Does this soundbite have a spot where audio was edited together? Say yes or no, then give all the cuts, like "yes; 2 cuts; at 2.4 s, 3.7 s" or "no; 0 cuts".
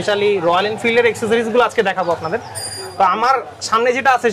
no; 0 cuts